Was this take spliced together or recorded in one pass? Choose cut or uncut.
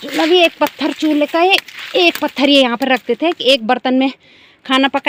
uncut